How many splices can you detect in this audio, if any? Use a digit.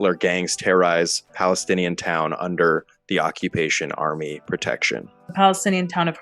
1